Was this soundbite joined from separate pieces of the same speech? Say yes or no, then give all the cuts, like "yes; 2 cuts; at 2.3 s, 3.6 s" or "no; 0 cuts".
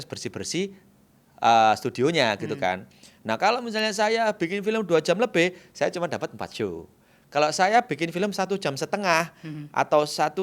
no; 0 cuts